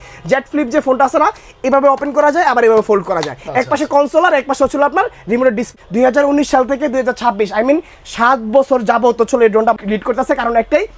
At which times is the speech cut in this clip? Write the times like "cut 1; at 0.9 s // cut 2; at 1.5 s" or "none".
cut 1; at 5.6 s // cut 2; at 9.8 s